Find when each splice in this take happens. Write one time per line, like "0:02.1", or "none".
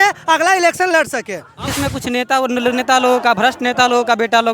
0:01.7